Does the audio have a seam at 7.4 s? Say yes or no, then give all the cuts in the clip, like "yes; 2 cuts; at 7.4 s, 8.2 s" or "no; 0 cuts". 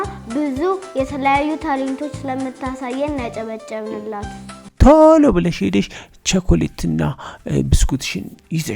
no; 1 cut; at 4.7 s